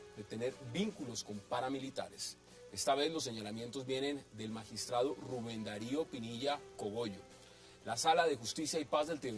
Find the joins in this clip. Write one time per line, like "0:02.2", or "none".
0:05.6